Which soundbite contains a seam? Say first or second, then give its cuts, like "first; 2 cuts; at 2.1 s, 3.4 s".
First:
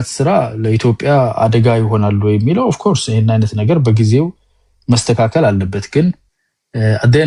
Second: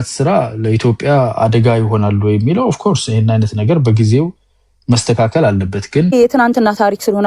second; 1 cut; at 6.1 s